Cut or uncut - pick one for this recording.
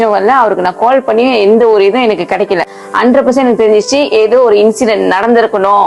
uncut